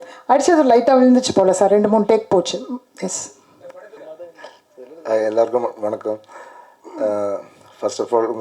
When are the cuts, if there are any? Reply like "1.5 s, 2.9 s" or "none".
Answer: none